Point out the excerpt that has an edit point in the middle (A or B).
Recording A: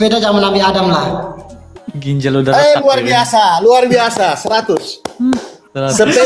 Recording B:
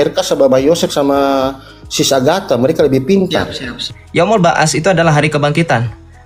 B